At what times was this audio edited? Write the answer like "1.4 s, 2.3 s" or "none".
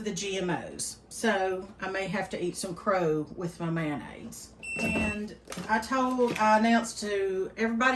4.9 s